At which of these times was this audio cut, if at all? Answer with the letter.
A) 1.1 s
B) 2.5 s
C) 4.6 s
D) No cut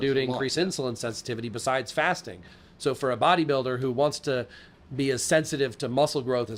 D